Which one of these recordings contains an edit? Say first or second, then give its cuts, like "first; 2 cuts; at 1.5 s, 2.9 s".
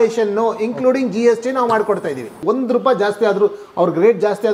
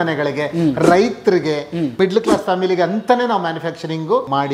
first; 1 cut; at 2.4 s